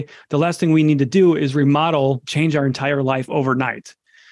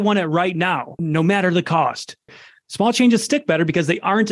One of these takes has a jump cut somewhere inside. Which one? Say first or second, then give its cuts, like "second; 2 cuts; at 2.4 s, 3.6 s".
second; 2 cuts; at 0.9 s, 2.4 s